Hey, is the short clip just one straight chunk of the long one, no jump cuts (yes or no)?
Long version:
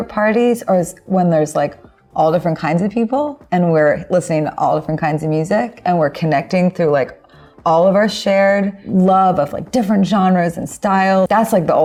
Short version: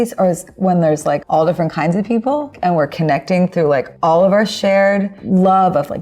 no